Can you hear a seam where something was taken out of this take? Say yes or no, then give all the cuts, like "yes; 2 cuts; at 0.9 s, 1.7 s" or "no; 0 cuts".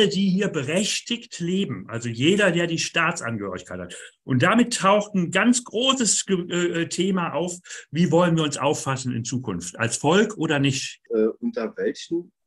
yes; 1 cut; at 11.0 s